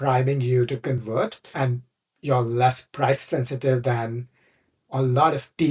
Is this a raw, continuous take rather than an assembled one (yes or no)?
no